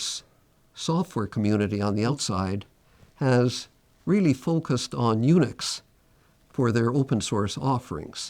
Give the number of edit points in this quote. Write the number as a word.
one